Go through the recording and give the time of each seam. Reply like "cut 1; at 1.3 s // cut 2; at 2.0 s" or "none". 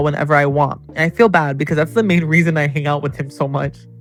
none

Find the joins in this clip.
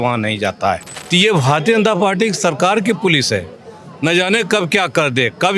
cut 1; at 0.9 s

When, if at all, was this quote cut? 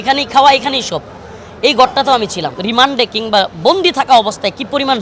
cut 1; at 2.6 s

